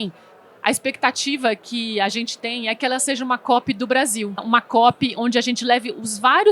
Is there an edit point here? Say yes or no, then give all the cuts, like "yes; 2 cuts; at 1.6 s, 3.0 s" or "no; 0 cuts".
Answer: yes; 1 cut; at 4.4 s